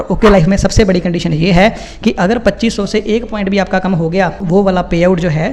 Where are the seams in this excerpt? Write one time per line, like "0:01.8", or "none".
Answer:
0:04.4